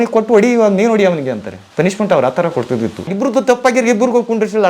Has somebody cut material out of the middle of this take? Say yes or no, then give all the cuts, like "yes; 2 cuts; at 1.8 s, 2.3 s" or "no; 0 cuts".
yes; 2 cuts; at 1.5 s, 3.1 s